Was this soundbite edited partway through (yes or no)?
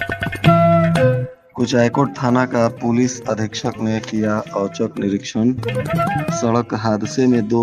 yes